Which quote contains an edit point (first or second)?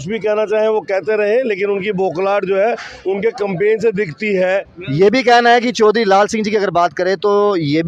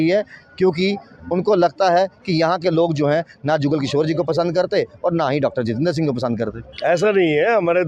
first